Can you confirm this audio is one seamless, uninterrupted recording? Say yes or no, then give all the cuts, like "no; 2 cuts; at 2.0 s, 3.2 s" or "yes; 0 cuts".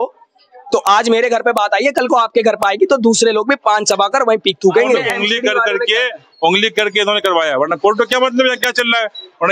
no; 1 cut; at 5.1 s